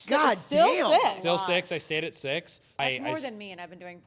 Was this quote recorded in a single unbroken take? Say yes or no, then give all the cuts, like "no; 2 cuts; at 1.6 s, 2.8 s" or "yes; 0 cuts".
no; 1 cut; at 2.7 s